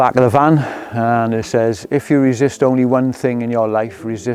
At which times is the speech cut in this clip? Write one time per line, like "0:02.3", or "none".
none